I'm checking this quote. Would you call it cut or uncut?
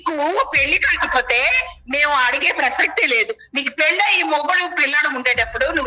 uncut